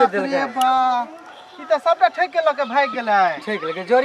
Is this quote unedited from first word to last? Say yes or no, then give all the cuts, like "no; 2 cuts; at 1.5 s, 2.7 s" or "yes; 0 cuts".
yes; 0 cuts